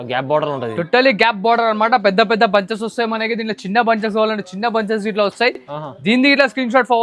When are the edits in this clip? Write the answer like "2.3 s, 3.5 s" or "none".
none